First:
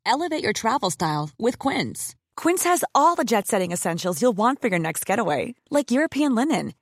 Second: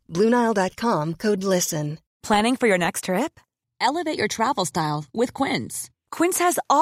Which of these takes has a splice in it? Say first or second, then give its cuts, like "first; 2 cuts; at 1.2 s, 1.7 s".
second; 1 cut; at 2.1 s